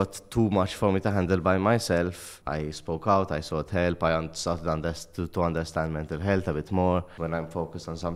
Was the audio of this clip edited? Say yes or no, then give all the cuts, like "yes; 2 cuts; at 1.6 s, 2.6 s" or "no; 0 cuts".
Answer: yes; 2 cuts; at 2.3 s, 7.1 s